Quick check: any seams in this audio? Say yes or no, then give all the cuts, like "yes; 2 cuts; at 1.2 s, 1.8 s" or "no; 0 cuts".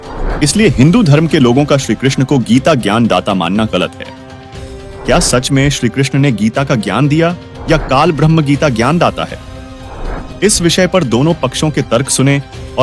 no; 0 cuts